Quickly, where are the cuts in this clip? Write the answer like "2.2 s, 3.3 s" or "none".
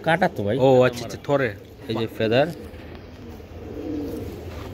2.1 s